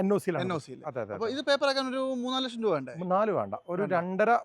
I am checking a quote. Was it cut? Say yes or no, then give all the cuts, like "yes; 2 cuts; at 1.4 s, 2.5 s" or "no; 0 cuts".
no; 0 cuts